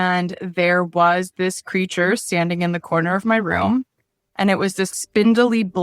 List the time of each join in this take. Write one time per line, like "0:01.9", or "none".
0:04.9